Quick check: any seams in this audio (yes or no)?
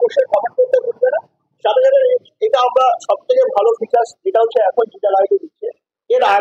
no